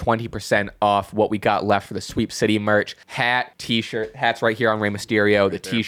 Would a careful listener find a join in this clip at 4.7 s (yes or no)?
no